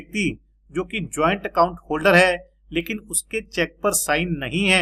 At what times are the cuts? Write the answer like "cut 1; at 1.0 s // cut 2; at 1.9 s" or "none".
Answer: none